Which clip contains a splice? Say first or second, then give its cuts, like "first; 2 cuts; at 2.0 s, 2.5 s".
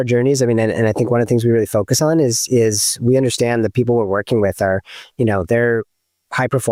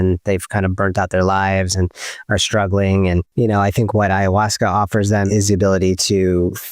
second; 2 cuts; at 3.3 s, 5.3 s